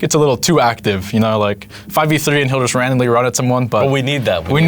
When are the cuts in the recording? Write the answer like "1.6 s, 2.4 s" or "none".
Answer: none